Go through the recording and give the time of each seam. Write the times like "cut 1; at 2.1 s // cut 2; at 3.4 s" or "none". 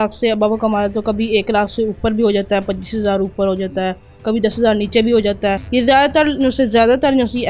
cut 1; at 5.6 s

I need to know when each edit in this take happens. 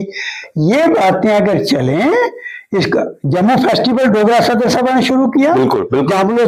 none

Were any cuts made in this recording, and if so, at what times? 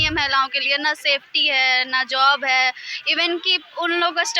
none

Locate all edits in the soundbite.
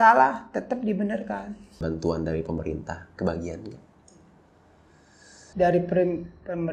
cut 1; at 1.8 s

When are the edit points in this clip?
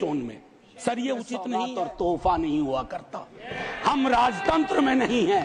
cut 1; at 1.6 s

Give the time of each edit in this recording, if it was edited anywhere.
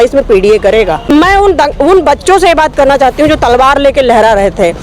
cut 1; at 1.0 s

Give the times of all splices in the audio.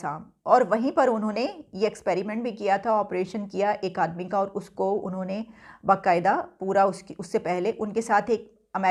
none

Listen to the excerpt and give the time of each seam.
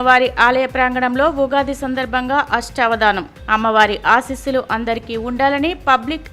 none

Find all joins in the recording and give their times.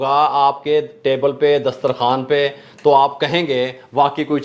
none

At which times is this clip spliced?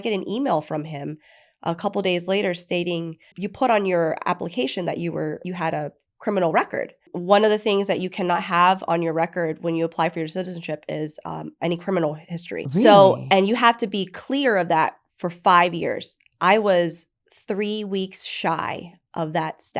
cut 1; at 3.3 s // cut 2; at 5.4 s // cut 3; at 7.1 s // cut 4; at 12.6 s

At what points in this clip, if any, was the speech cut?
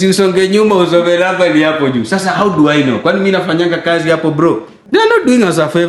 cut 1; at 4.7 s

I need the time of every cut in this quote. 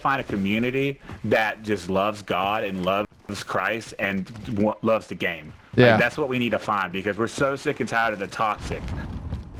none

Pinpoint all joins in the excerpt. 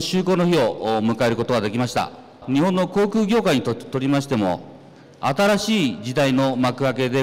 cut 1; at 2.4 s

